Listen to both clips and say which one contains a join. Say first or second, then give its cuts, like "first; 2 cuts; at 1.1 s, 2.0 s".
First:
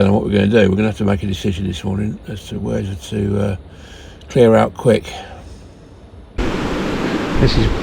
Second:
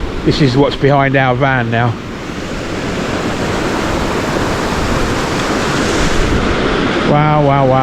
first; 1 cut; at 6.4 s